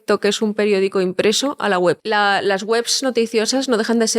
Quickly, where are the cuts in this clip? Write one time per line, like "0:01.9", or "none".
0:02.0